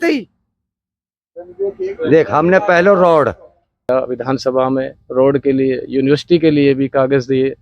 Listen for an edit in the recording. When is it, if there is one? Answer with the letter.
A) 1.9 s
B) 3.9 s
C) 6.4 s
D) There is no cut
B